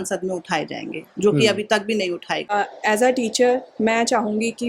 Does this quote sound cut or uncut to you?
cut